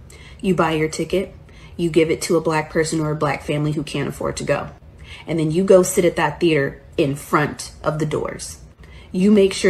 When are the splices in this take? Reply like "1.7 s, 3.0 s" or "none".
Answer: 7.5 s